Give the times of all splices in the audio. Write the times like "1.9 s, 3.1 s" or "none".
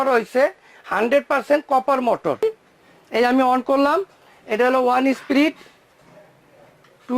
2.4 s